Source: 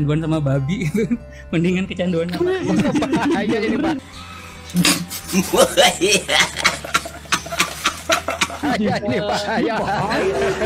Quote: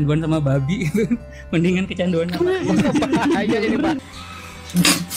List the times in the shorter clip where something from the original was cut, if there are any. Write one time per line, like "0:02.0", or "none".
none